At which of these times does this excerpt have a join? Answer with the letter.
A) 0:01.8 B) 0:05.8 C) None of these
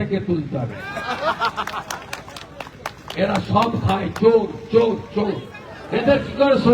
B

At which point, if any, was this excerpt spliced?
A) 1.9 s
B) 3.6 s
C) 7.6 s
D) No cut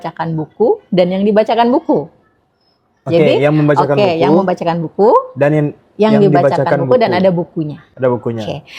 D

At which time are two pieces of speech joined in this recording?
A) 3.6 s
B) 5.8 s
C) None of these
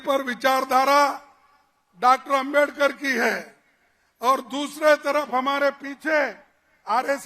C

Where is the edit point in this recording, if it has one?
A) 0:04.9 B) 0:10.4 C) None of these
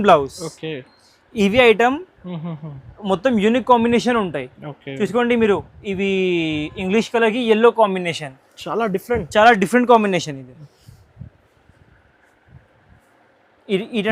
C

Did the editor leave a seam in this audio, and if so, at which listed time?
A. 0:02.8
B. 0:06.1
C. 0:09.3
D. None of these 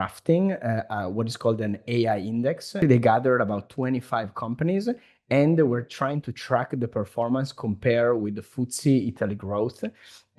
A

